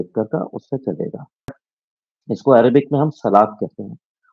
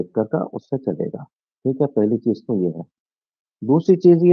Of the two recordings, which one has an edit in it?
first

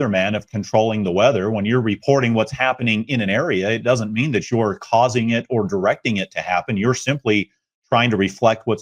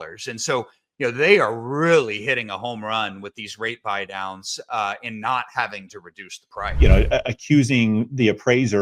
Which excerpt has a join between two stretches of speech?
second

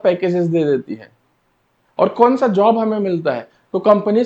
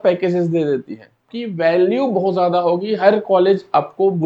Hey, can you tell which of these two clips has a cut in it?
second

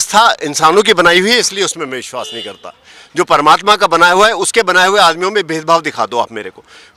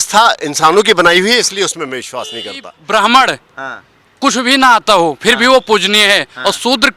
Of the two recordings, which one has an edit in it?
second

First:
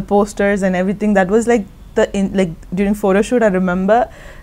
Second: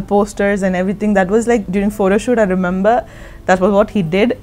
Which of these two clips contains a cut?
second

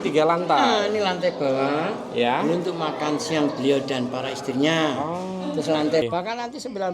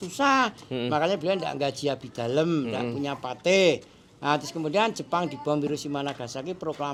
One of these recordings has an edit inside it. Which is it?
first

